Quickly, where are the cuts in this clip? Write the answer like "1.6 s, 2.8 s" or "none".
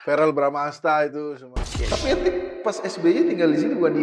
1.5 s